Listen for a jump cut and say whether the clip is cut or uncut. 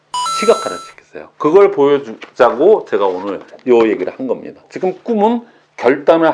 cut